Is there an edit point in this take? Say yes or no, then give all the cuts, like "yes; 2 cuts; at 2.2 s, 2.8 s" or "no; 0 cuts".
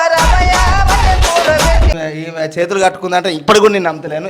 yes; 1 cut; at 1.9 s